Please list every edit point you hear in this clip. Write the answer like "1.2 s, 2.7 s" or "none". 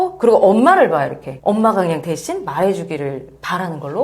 none